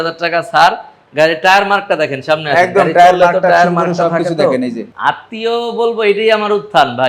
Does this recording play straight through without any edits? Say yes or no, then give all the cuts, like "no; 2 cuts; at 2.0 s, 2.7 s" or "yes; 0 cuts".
no; 1 cut; at 4.9 s